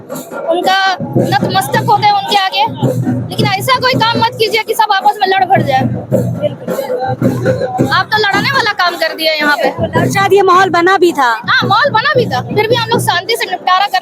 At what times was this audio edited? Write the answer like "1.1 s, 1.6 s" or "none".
none